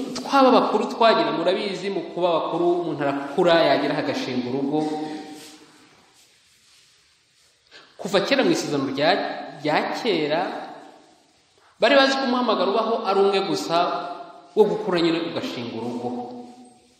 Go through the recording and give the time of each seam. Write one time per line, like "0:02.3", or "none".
none